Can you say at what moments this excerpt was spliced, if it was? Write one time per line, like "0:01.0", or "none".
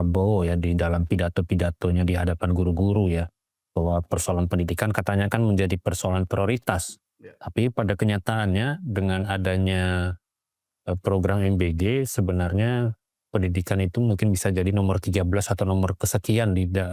none